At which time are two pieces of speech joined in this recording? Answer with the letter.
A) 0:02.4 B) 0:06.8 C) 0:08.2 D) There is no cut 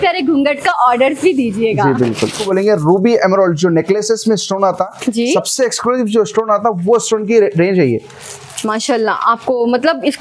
A